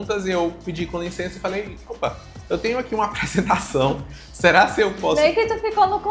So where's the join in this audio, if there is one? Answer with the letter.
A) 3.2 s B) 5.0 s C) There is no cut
C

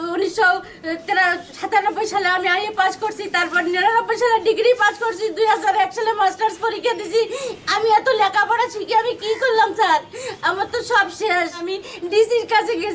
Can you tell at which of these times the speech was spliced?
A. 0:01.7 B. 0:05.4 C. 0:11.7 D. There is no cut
C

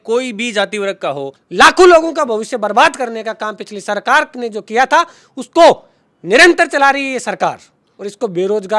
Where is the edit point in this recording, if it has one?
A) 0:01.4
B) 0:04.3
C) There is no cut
A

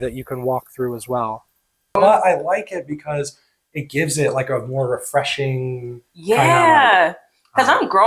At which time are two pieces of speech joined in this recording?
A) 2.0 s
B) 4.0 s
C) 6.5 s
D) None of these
A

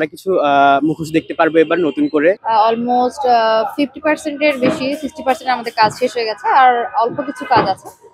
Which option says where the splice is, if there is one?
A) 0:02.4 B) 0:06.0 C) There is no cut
A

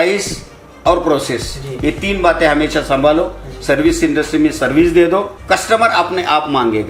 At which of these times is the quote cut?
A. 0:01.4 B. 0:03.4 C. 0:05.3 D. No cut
C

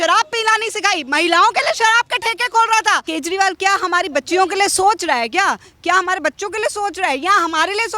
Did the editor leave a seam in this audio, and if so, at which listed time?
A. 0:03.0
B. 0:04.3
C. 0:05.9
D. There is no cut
A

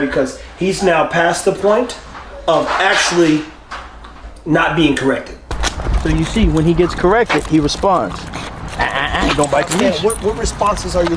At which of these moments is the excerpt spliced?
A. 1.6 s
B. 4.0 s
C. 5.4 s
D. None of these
C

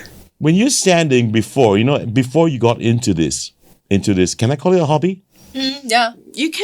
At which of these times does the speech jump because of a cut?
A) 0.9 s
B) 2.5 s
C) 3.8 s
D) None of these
D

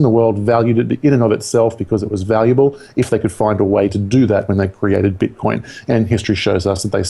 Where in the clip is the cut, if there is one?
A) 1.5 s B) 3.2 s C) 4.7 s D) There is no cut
D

